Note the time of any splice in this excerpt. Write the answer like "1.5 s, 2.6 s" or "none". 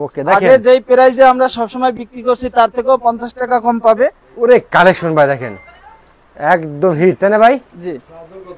4.2 s